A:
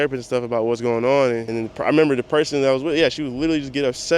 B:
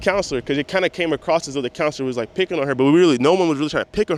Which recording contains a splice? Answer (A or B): A